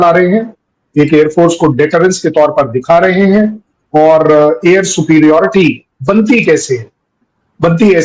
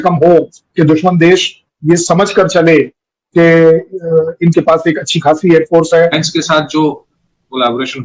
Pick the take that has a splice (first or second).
second